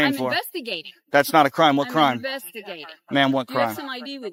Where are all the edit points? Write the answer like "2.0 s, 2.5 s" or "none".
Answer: none

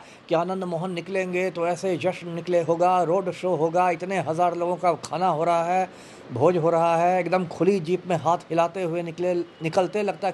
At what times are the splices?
none

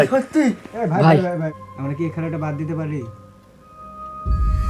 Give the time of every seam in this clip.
1.5 s

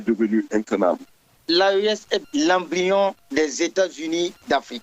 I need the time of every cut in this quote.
1.2 s, 2.2 s

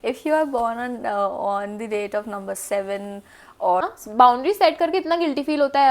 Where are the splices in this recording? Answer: 3.8 s

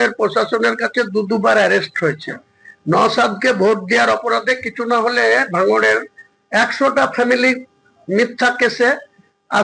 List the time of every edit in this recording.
none

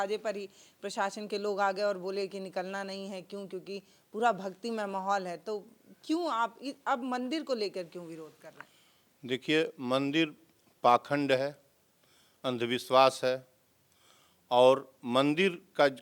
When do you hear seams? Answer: none

